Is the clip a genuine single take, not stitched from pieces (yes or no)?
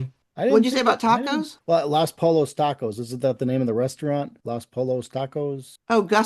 yes